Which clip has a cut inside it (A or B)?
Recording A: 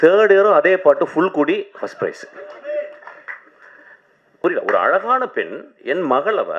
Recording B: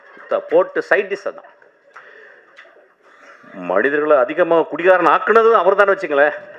A